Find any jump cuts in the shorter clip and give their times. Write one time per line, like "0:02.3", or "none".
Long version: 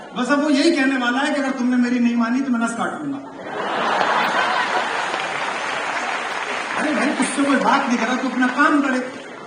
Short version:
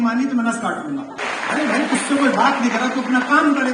0:01.2